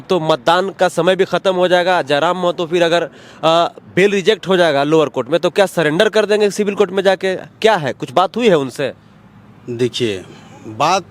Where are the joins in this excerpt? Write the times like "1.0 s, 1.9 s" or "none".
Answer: none